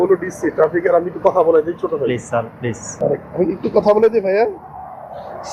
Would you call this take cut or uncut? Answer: cut